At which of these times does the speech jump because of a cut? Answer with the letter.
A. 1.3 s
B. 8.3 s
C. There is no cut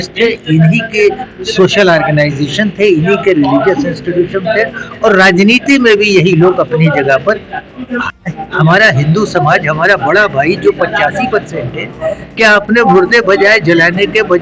B